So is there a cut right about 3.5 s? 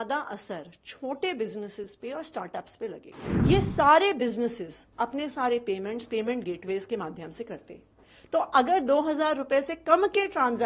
yes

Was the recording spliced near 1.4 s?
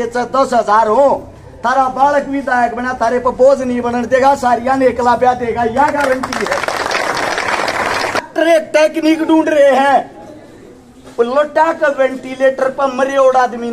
no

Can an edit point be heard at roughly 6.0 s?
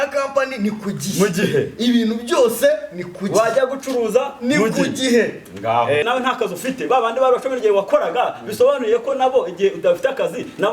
yes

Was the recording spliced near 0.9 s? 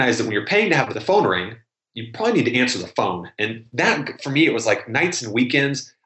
yes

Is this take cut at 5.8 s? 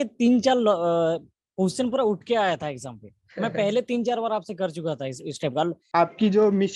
yes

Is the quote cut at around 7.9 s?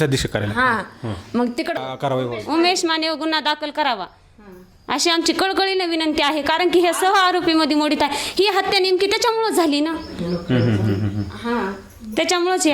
no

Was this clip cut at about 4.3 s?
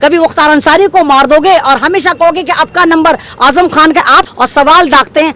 yes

